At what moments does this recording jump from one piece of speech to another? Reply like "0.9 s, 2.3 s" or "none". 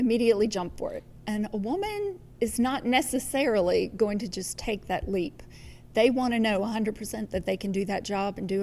2.2 s